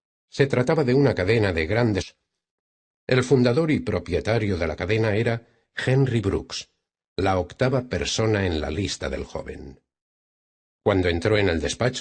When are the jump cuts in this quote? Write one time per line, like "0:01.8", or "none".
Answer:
none